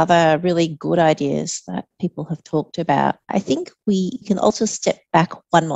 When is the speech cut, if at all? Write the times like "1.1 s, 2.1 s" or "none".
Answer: 3.2 s, 4.5 s